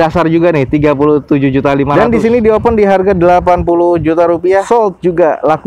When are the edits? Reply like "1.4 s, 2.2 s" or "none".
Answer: 1.9 s, 4.6 s

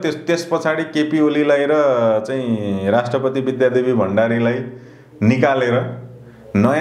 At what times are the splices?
none

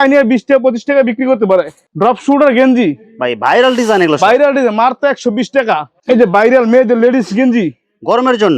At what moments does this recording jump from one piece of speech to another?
1.8 s, 6.0 s

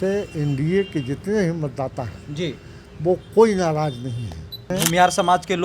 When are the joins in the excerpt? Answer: 4.7 s

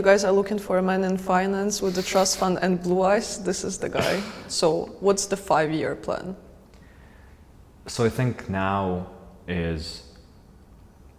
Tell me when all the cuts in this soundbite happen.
none

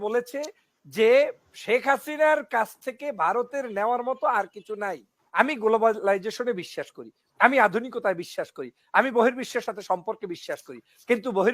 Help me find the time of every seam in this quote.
5.4 s

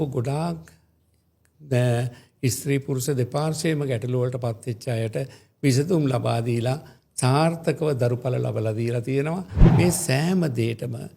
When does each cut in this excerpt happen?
9.6 s

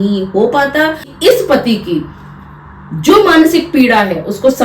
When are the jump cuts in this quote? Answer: 1.1 s

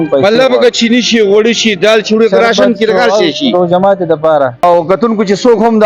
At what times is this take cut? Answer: 4.6 s

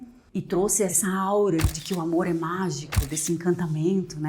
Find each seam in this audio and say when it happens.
0.9 s, 1.8 s

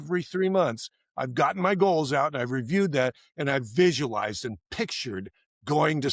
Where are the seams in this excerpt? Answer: none

